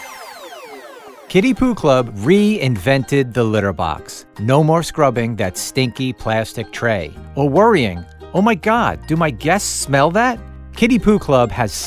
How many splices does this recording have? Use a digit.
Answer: 0